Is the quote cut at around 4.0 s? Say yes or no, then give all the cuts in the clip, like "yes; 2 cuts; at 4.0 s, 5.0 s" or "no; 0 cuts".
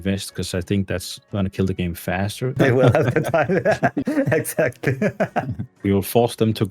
no; 2 cuts; at 2.6 s, 5.7 s